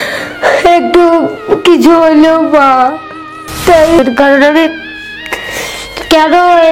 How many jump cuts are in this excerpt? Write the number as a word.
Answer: one